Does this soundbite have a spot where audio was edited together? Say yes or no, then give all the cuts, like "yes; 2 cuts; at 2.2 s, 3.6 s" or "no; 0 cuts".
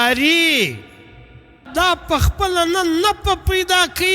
yes; 1 cut; at 1.6 s